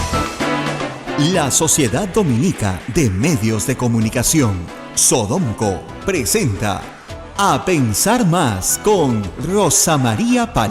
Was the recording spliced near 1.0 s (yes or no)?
yes